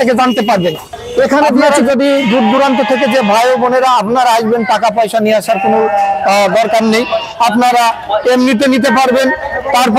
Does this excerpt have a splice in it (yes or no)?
yes